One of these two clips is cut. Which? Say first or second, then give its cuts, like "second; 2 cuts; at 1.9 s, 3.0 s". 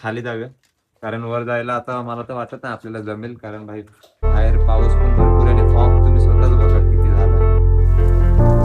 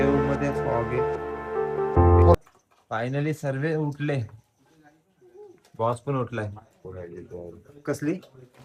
second; 1 cut; at 2.3 s